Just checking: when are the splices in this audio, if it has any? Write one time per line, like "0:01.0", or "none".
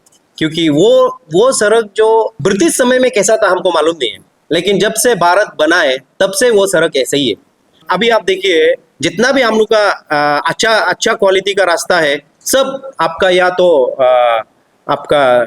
0:02.4
0:07.9